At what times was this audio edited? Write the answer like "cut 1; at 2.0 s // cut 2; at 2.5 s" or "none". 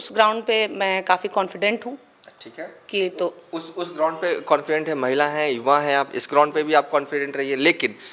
none